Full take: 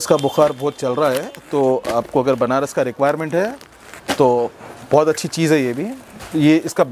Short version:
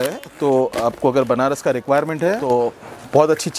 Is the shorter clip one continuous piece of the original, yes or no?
no